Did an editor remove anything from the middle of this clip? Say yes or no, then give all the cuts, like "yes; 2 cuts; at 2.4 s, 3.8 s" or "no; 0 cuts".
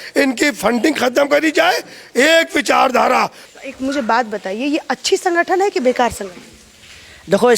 yes; 1 cut; at 3.4 s